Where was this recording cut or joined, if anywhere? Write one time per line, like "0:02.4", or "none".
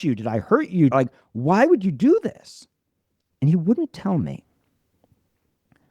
0:00.9

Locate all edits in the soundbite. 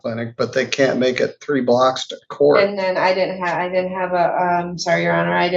none

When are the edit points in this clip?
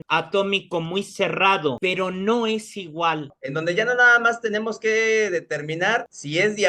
0:03.3

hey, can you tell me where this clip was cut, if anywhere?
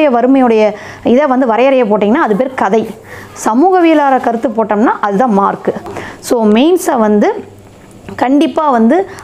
0:05.9

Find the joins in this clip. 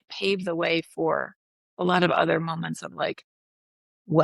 none

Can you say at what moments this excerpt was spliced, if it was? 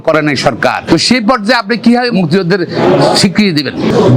0:00.9
0:02.1

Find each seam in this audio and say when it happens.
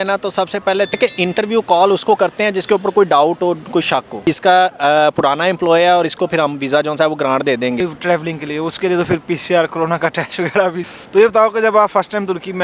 0:01.0
0:04.2
0:07.8
0:10.9

